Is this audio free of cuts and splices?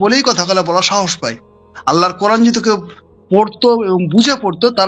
yes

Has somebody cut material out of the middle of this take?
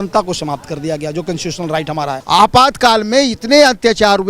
yes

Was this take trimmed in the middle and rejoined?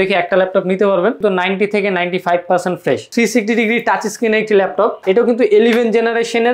yes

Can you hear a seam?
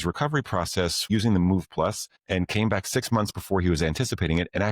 yes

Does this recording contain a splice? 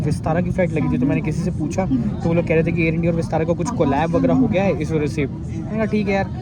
no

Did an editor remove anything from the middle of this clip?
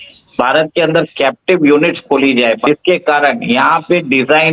yes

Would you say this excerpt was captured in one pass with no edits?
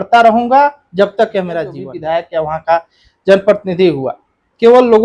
no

